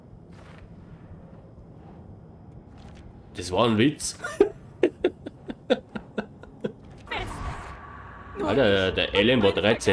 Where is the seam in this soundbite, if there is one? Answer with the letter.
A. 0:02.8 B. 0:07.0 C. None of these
B